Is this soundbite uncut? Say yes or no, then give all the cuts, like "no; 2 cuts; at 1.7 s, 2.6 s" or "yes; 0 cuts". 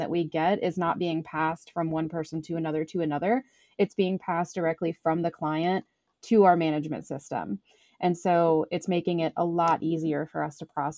yes; 0 cuts